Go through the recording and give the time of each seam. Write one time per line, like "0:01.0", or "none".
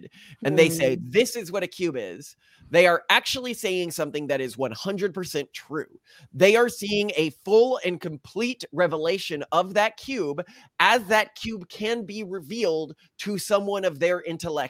none

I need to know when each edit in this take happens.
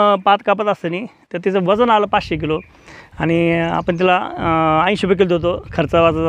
none

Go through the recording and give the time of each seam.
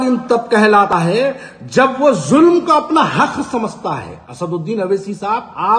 0:00.9

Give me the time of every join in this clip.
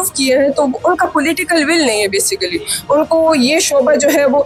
none

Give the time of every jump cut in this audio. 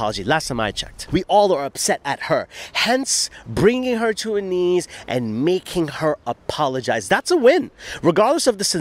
0:00.9

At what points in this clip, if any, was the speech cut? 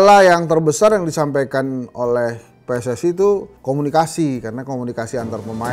none

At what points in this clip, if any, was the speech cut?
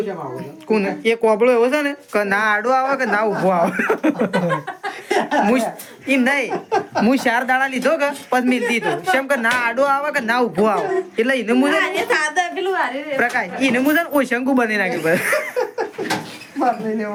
none

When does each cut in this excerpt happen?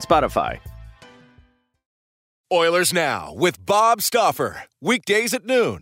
0:02.3

